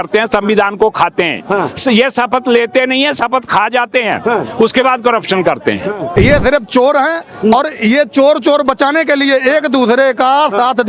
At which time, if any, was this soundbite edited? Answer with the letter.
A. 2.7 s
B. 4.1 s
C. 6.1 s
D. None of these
C